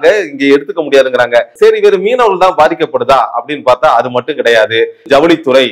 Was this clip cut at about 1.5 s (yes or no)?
yes